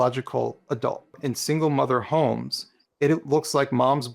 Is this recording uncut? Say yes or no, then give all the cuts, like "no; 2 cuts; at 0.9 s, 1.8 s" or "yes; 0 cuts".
no; 1 cut; at 1.2 s